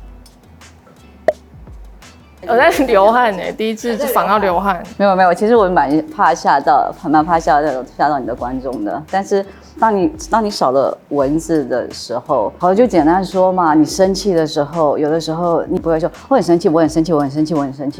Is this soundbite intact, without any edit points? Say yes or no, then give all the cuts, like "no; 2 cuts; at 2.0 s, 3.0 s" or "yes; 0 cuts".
yes; 0 cuts